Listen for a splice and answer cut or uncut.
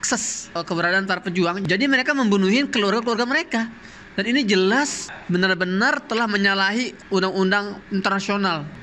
uncut